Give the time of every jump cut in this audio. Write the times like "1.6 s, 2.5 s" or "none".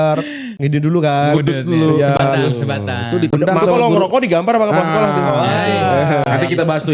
none